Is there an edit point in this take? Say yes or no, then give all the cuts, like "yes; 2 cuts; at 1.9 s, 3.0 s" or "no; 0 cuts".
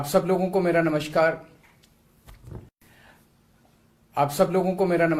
yes; 1 cut; at 2.8 s